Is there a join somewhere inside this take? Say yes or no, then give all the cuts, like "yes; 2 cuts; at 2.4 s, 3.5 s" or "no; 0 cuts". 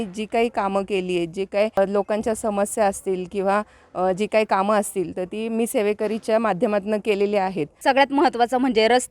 yes; 2 cuts; at 1.8 s, 7.7 s